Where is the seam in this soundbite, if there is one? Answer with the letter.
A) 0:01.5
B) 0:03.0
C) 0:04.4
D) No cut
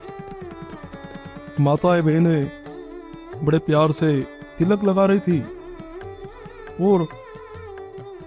C